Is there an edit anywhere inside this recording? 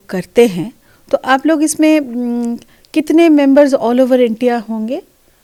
no; 0 cuts

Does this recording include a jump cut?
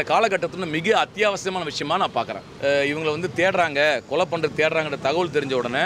yes; 1 cut; at 2.5 s

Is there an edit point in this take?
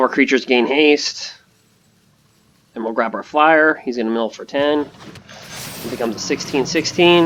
no; 0 cuts

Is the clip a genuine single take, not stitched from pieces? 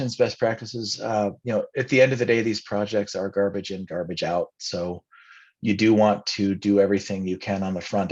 yes; 0 cuts

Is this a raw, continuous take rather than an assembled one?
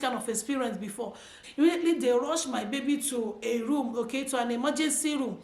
no; 1 cut; at 1.4 s

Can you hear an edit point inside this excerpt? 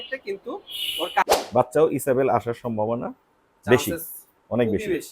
yes; 1 cut; at 1.2 s

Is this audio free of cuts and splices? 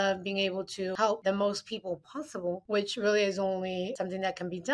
no; 2 cuts; at 1.1 s, 3.9 s

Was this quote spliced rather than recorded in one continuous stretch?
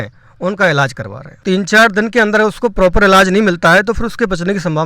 yes; 1 cut; at 1.4 s

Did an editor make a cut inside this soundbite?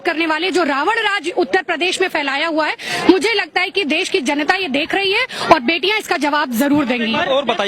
no; 0 cuts

